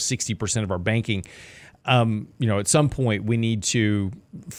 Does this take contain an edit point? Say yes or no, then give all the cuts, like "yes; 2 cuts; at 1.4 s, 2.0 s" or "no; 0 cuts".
no; 0 cuts